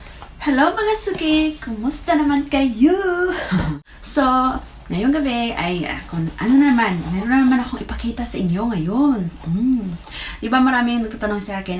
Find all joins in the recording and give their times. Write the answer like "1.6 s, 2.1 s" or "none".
3.7 s